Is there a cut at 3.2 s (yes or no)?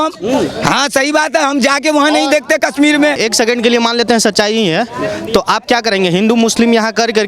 yes